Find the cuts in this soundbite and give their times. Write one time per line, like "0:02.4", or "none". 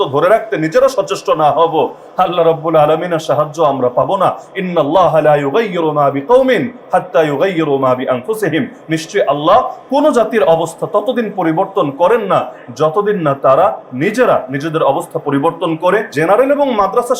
0:16.1